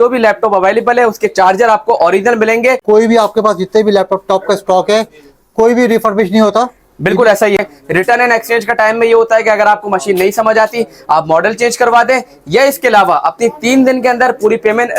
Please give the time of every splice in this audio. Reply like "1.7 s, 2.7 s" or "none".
2.8 s, 7.6 s